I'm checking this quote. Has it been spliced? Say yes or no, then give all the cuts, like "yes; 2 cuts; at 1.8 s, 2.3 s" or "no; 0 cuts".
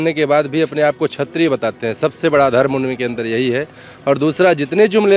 no; 0 cuts